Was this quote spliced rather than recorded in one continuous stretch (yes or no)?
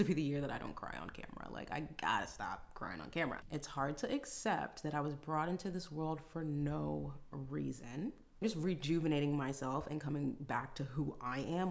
yes